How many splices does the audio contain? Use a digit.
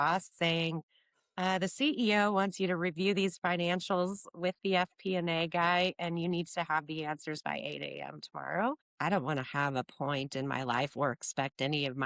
1